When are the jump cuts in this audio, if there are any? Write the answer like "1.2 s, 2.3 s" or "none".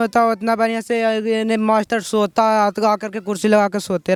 none